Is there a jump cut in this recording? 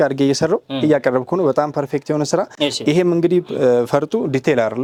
no; 0 cuts

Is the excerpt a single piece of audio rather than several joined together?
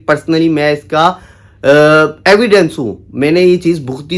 yes; 0 cuts

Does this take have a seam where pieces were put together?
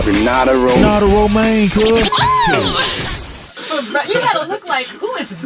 yes; 1 cut; at 1.7 s

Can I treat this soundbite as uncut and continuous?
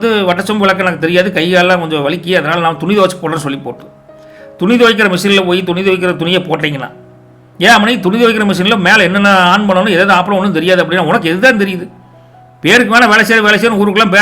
yes; 0 cuts

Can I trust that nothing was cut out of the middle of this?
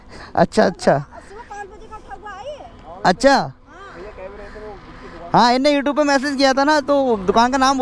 yes; 0 cuts

